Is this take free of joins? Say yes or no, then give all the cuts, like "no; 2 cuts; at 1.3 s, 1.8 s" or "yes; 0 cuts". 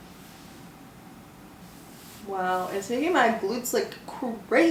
yes; 0 cuts